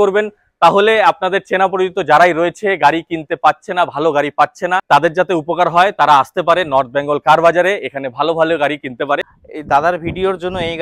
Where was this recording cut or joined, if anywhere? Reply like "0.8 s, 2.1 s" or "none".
4.8 s, 9.4 s